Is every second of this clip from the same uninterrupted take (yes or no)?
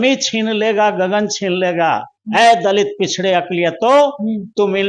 yes